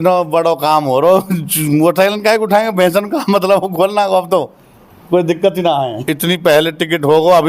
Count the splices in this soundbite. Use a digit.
1